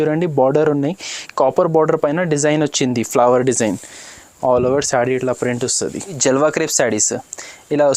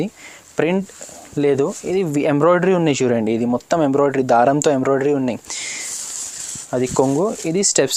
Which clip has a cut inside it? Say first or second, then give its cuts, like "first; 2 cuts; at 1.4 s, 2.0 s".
first; 1 cut; at 6.2 s